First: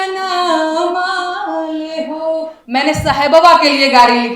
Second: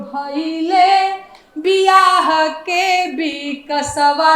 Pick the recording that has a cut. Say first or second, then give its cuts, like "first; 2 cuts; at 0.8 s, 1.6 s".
first; 1 cut; at 2.5 s